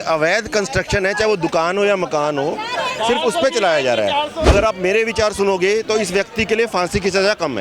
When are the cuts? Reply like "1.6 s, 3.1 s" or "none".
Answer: 4.3 s